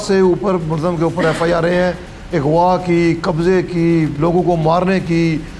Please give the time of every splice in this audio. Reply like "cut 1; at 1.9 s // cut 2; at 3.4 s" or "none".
none